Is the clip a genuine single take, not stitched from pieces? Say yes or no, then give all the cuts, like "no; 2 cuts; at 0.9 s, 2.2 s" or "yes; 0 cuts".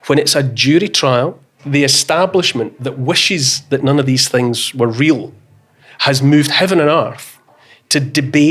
no; 1 cut; at 1.5 s